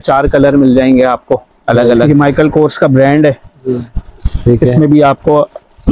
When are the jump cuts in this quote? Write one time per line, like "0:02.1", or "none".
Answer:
0:02.1